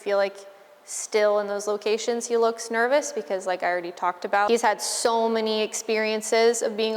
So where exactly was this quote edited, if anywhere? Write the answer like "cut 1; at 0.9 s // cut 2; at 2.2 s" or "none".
cut 1; at 4.5 s